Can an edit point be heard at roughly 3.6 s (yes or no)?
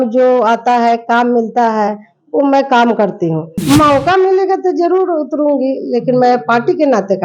yes